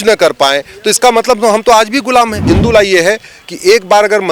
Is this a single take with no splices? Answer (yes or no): no